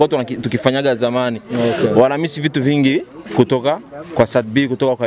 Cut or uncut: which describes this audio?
uncut